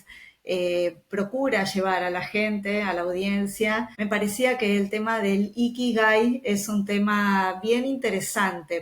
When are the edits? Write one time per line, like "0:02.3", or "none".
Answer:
0:03.9